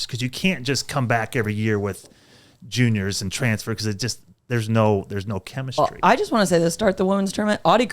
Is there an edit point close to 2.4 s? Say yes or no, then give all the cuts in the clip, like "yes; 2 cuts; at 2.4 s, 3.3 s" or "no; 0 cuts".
no; 1 cut; at 5.8 s